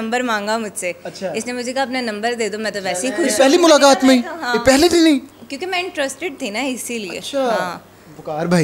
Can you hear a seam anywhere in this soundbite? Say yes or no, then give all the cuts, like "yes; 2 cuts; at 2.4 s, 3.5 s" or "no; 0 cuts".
no; 0 cuts